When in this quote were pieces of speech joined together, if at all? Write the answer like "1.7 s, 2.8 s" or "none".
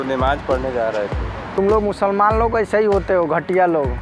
1.6 s